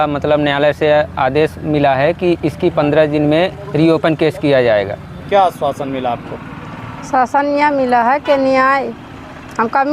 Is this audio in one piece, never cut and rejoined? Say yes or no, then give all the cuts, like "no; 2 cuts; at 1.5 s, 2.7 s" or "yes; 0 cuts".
no; 1 cut; at 5.2 s